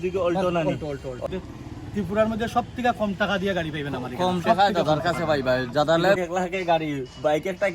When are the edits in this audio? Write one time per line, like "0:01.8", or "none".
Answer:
0:01.3
0:06.2